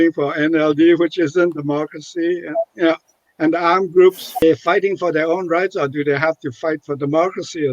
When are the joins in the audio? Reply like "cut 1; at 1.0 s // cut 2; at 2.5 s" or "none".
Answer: cut 1; at 4.4 s